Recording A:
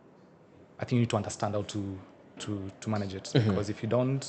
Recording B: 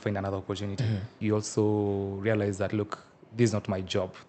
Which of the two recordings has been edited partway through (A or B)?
B